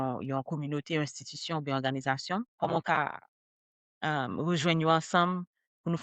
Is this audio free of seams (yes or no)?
no